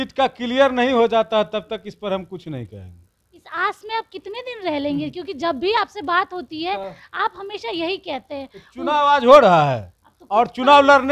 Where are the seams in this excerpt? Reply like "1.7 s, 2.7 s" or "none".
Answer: none